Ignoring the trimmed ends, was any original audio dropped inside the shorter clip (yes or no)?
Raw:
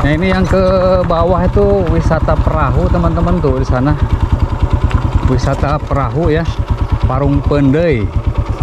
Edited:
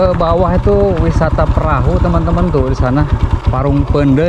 yes